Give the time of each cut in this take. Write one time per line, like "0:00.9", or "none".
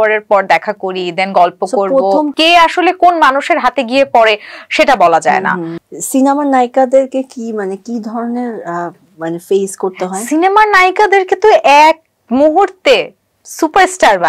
0:02.3
0:05.7